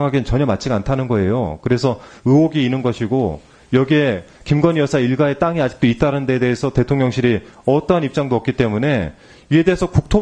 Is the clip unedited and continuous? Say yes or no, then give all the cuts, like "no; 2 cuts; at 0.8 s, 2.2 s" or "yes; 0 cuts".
yes; 0 cuts